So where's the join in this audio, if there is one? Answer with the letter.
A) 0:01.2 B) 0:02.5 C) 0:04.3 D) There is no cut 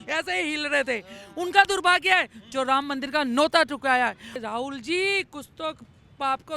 C